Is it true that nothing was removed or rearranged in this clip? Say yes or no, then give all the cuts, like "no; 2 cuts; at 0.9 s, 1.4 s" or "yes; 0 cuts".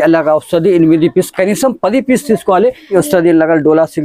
no; 1 cut; at 2.9 s